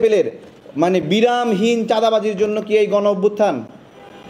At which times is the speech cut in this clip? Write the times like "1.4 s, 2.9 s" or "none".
none